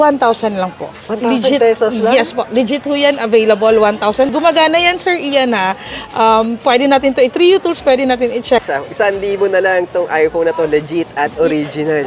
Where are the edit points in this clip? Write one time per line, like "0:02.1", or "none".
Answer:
0:04.3
0:08.8